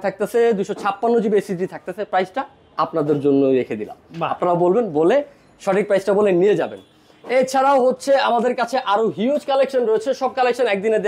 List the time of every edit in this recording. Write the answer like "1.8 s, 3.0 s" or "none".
none